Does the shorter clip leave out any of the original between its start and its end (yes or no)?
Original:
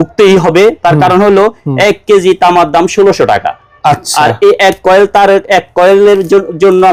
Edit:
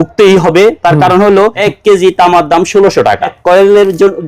yes